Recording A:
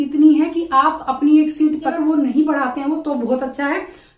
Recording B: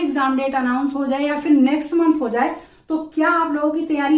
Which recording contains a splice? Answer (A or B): A